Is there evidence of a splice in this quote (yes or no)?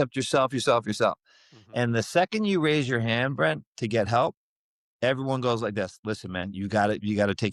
no